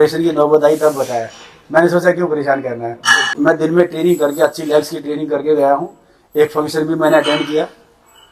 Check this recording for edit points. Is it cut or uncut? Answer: cut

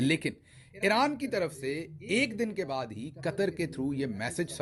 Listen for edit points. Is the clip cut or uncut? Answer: uncut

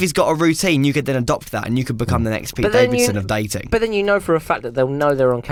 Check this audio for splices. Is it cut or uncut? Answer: uncut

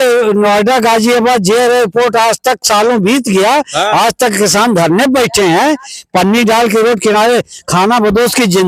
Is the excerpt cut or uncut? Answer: uncut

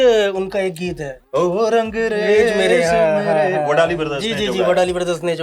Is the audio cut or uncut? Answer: cut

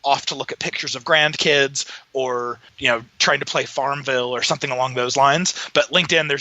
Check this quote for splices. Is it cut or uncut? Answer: cut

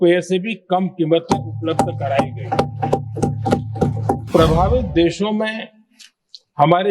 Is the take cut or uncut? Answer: cut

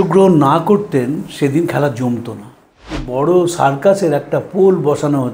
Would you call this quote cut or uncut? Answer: cut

